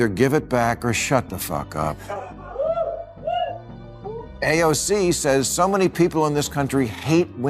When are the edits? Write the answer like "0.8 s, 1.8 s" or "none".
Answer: 4.1 s